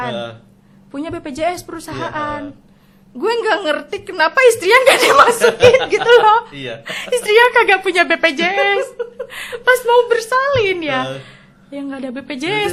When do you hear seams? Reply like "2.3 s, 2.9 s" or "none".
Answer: none